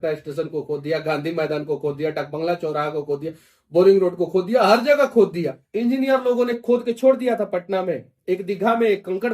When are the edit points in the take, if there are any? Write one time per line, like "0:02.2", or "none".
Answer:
0:05.6